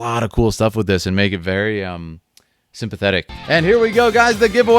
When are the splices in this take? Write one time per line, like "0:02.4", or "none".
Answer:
0:03.3